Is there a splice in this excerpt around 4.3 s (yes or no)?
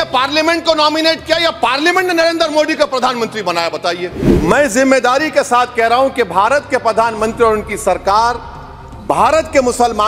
yes